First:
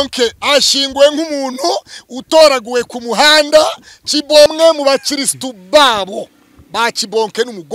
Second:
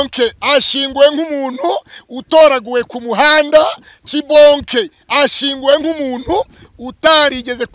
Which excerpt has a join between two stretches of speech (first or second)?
first